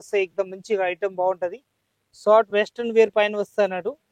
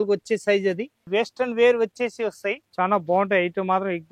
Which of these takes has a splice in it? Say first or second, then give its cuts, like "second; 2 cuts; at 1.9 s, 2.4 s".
second; 1 cut; at 0.9 s